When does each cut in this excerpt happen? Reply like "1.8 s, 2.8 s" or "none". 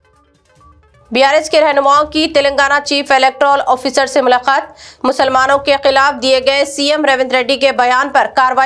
none